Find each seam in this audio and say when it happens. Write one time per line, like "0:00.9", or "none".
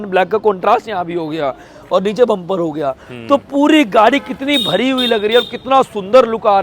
none